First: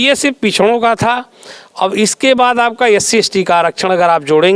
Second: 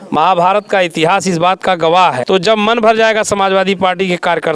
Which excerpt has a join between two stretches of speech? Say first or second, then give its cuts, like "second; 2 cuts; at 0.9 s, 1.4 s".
second; 1 cut; at 2.2 s